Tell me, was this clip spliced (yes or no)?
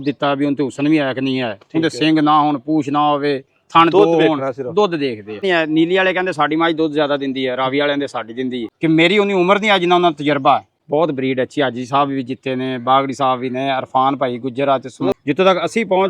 yes